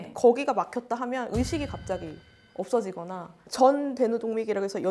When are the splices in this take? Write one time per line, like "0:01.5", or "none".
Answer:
0:03.5